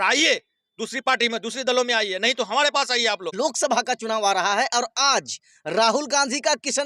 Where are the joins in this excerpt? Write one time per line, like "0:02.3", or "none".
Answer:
0:03.3